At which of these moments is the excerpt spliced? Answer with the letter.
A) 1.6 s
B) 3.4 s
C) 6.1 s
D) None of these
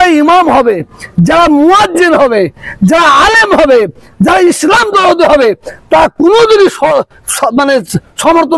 D